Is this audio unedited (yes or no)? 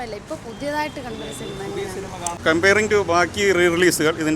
no